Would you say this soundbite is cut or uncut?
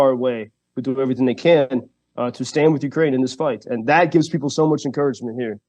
uncut